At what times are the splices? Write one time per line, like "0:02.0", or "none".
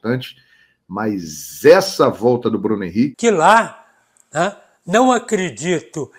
0:03.1